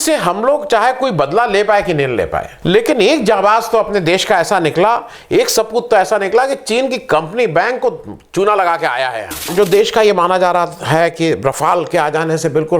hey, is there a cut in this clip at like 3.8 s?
no; 2 cuts; at 2.5 s, 9.5 s

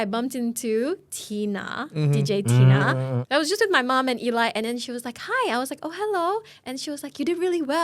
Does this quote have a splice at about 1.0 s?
no; 1 cut; at 3.2 s

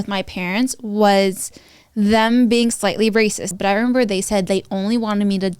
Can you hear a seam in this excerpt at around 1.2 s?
no; 1 cut; at 3.5 s

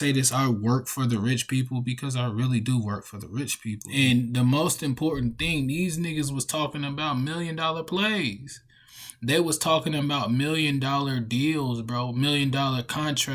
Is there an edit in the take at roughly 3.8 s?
yes; 1 cut; at 3.8 s

